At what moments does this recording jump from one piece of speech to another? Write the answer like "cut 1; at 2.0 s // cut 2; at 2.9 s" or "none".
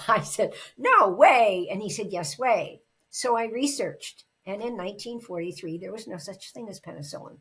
none